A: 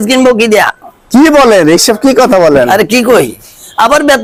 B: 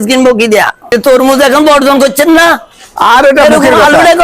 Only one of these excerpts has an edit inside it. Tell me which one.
B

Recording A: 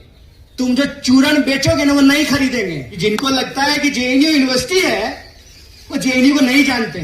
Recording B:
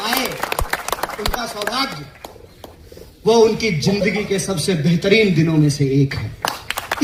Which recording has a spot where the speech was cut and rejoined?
A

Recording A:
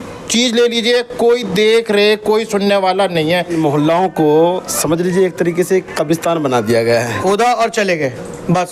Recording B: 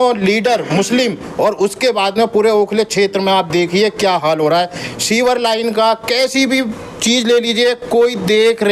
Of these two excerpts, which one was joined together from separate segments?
A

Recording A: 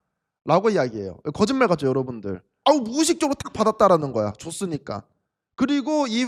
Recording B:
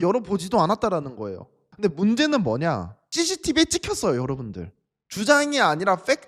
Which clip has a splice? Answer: A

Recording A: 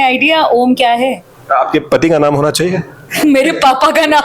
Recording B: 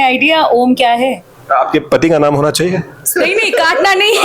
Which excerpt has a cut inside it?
B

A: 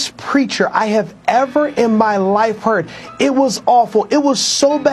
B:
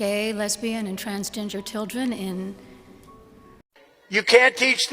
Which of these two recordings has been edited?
B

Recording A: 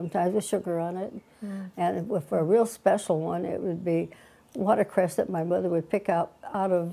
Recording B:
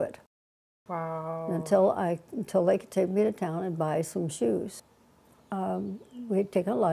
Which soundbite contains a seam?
B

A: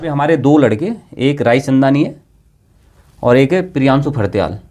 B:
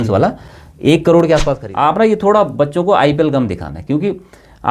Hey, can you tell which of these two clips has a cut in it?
B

